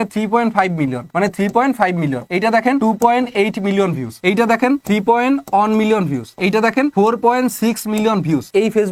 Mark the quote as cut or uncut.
uncut